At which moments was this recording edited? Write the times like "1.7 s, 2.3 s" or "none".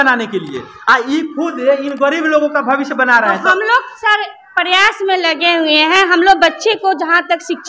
none